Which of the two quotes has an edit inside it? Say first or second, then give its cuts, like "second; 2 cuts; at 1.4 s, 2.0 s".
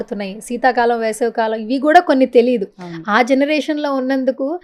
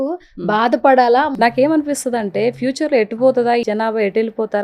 second; 2 cuts; at 1.3 s, 3.7 s